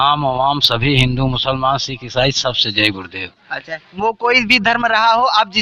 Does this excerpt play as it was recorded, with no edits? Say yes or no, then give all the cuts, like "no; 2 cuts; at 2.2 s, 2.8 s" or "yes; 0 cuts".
yes; 0 cuts